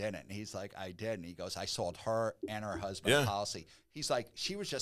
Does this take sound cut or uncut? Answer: uncut